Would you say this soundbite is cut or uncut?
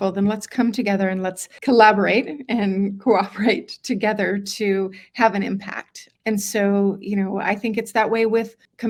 uncut